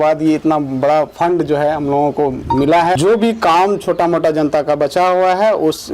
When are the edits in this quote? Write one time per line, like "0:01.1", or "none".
0:03.0